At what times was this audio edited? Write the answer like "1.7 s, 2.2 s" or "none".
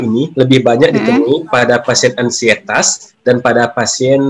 none

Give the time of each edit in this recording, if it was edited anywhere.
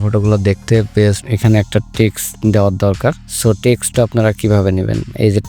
1.3 s

